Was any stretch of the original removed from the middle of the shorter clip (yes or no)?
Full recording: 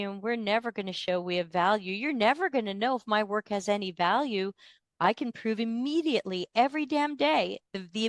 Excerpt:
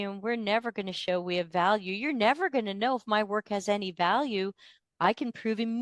no